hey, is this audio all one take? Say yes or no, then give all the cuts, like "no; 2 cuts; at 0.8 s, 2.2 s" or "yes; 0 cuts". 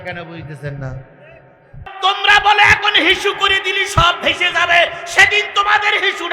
no; 1 cut; at 1.8 s